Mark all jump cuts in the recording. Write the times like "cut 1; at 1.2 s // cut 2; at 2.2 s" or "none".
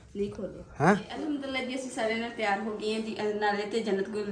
cut 1; at 1.1 s